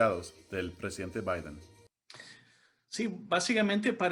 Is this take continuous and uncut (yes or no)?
yes